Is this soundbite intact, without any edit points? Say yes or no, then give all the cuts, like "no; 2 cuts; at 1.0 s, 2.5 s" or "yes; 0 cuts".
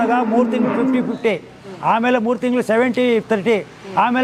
yes; 0 cuts